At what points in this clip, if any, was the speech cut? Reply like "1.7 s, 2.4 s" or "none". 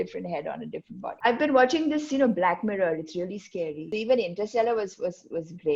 1.1 s, 3.9 s